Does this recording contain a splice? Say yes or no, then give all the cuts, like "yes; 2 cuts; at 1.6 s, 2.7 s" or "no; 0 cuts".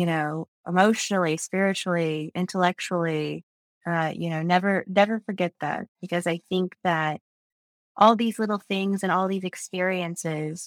no; 0 cuts